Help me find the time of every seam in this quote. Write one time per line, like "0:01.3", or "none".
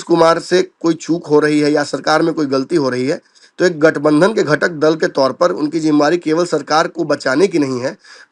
none